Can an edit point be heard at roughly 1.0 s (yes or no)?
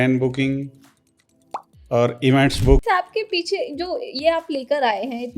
no